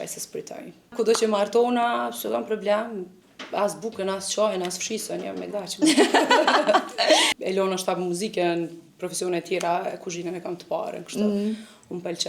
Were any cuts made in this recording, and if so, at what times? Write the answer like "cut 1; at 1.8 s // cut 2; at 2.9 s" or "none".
cut 1; at 0.9 s // cut 2; at 7.3 s